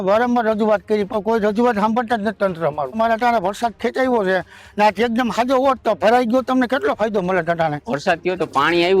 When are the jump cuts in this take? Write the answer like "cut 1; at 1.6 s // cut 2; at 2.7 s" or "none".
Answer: cut 1; at 3.0 s // cut 2; at 7.9 s